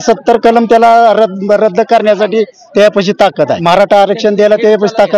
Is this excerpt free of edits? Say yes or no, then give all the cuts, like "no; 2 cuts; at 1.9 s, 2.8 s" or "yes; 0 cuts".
no; 1 cut; at 3.6 s